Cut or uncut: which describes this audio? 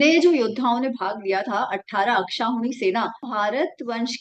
cut